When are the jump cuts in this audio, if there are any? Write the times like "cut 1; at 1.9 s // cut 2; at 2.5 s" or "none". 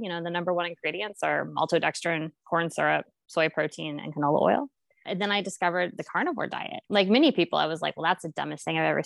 cut 1; at 5.0 s // cut 2; at 6.7 s

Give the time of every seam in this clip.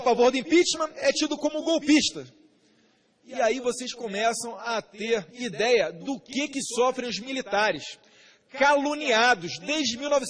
cut 1; at 1.7 s

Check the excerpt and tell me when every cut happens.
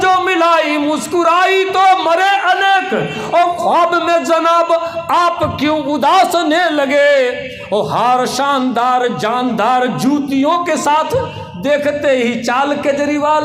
none

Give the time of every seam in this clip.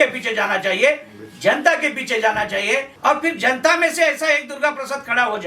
cut 1; at 2.9 s

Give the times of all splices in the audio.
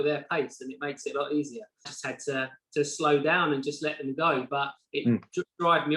cut 1; at 1.9 s

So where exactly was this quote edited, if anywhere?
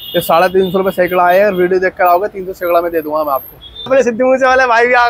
cut 1; at 3.9 s

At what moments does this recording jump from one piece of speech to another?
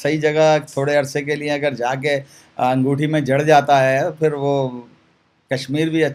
none

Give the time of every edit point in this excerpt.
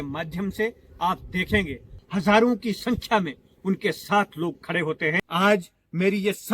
cut 1; at 5.2 s

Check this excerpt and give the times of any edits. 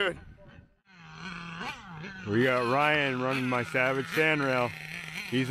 cut 1; at 1.1 s

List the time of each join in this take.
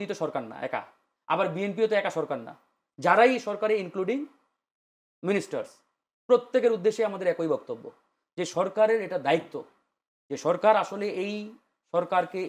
none

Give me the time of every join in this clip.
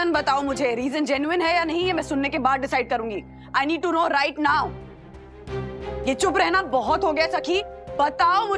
cut 1; at 5.9 s

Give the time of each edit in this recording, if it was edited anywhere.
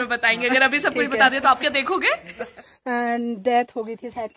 cut 1; at 2.7 s

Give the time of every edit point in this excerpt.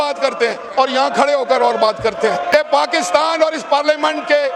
cut 1; at 2.5 s

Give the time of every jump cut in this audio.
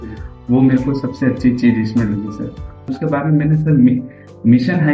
cut 1; at 2.9 s

